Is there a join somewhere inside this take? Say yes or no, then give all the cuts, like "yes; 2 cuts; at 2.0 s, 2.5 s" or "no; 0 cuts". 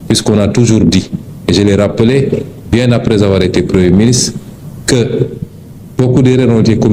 no; 0 cuts